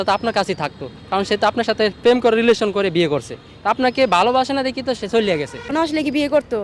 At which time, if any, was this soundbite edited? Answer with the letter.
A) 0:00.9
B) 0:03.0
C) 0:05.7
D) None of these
C